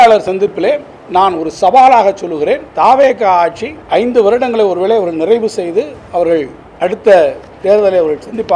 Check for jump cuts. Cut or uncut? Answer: cut